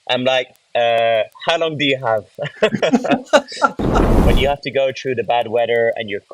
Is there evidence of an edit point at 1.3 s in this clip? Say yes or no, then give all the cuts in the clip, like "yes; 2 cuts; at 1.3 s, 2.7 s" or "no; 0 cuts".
no; 1 cut; at 4.1 s